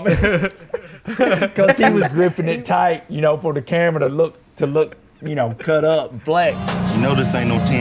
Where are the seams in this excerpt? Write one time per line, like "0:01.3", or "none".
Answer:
0:02.1
0:06.6